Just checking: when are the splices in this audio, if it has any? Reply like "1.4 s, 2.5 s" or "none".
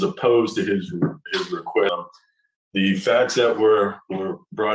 1.9 s